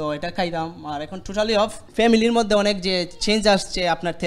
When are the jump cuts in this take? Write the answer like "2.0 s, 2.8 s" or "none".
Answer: 1.8 s